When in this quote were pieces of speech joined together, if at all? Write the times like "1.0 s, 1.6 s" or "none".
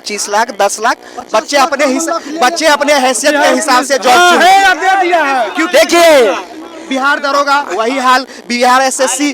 none